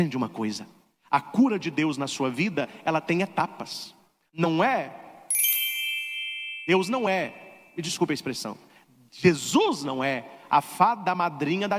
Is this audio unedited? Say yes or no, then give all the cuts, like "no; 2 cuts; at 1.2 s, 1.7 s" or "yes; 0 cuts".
yes; 0 cuts